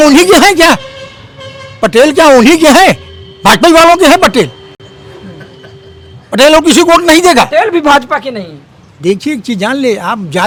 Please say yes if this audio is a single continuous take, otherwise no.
yes